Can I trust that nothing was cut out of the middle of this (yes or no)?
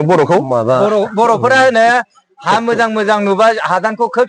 yes